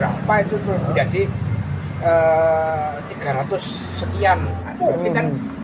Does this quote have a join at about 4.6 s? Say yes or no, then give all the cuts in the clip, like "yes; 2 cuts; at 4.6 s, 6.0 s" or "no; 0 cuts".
yes; 1 cut; at 4.6 s